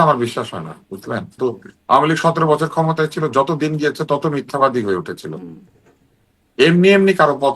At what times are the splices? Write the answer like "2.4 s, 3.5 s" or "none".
1.4 s